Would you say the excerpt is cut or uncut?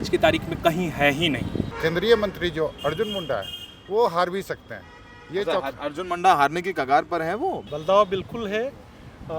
cut